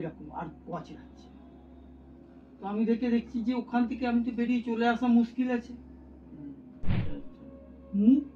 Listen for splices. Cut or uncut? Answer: cut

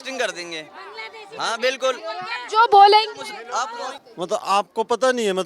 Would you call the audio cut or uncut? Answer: cut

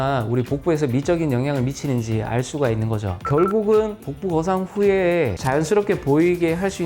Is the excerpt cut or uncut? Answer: cut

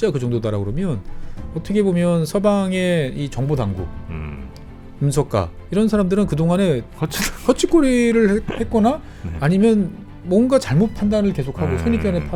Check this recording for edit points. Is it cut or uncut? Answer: uncut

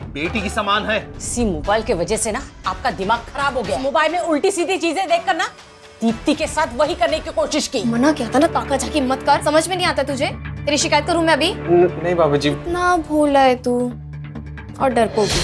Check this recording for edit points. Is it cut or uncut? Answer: cut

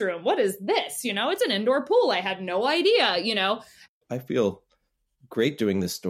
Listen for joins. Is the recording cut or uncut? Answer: cut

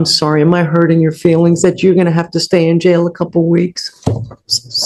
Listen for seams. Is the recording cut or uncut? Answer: uncut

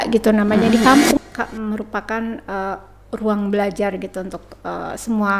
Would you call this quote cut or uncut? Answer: cut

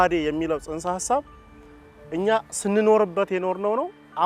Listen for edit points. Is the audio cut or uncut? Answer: uncut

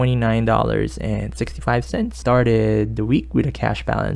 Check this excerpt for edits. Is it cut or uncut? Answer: cut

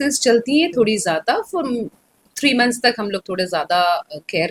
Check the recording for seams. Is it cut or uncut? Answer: uncut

